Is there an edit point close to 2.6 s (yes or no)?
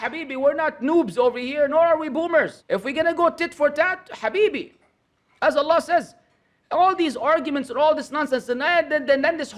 yes